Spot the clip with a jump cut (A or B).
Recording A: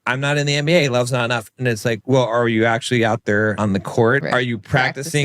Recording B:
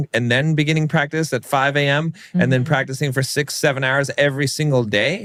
A